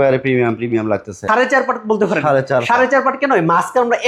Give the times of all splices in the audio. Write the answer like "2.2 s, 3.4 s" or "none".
1.2 s